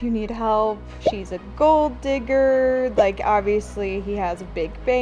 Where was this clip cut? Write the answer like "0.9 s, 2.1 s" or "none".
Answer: 1.0 s

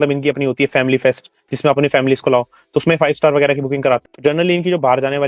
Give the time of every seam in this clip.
4.1 s

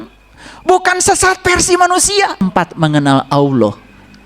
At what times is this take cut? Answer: 2.4 s

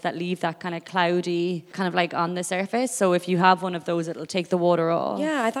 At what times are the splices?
1.7 s

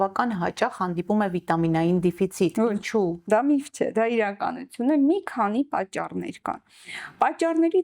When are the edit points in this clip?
none

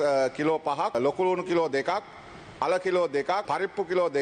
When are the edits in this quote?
0.9 s, 3.4 s

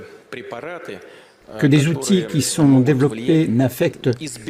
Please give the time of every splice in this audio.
none

